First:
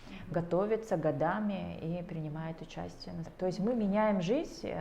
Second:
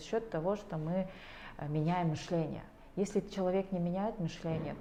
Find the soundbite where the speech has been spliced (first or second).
first